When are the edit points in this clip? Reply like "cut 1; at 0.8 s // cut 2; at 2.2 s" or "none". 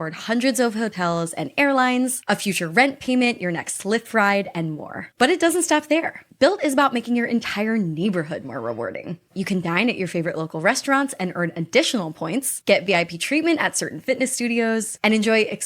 cut 1; at 2.2 s